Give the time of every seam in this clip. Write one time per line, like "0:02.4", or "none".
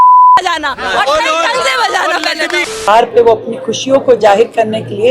0:02.9